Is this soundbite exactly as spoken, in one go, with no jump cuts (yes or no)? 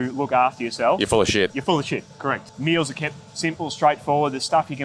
no